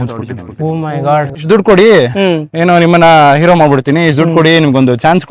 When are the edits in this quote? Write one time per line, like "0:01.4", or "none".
0:01.4